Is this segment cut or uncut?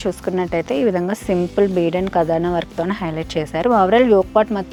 uncut